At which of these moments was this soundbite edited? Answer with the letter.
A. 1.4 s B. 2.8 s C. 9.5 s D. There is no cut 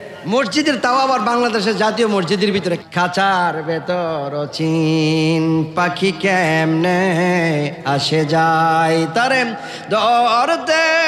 B